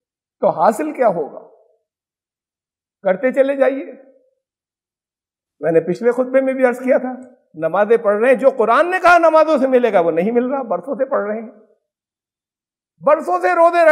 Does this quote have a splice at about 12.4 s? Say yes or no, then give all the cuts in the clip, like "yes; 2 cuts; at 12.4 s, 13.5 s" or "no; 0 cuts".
no; 0 cuts